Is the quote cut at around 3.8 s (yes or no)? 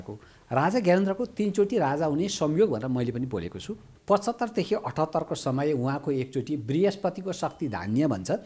yes